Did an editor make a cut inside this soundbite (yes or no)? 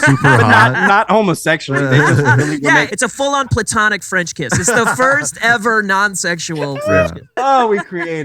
yes